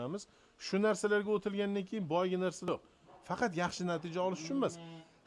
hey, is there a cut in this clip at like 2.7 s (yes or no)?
yes